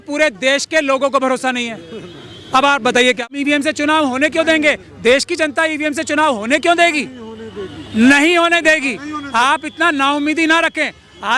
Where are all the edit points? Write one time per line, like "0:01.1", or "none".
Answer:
0:03.3